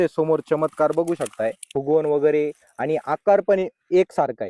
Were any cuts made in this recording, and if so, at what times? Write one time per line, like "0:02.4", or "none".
0:01.6